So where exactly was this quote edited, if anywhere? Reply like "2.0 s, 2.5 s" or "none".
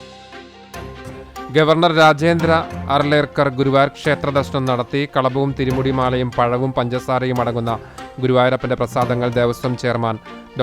1.1 s